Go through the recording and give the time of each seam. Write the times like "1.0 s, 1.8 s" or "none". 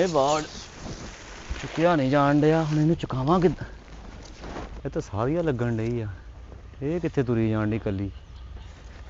none